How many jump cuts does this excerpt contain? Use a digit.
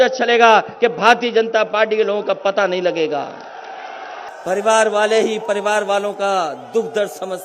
1